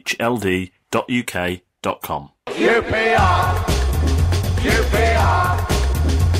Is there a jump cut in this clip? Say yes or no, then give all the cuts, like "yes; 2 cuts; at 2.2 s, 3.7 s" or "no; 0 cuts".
yes; 1 cut; at 2.4 s